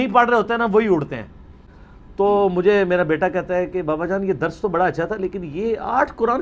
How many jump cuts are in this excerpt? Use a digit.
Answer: 1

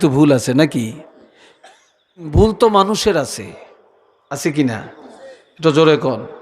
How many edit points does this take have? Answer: 1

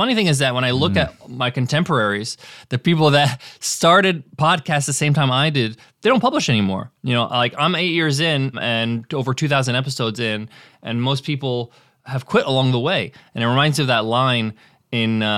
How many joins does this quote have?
0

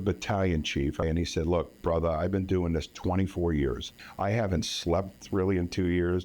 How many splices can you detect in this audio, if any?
2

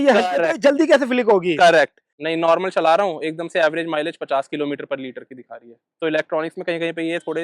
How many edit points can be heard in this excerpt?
1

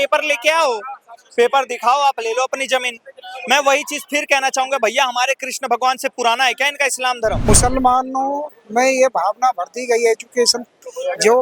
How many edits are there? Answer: 1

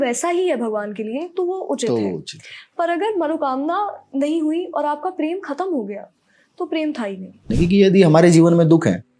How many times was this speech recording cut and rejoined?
1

